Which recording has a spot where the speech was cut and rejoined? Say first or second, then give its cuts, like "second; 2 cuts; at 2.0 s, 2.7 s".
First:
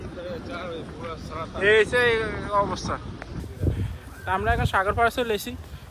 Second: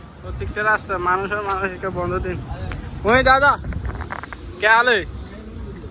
first; 1 cut; at 3.5 s